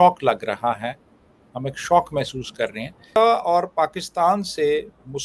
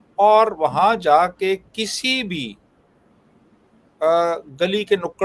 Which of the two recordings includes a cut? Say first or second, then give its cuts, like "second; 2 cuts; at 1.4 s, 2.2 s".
first; 1 cut; at 3.1 s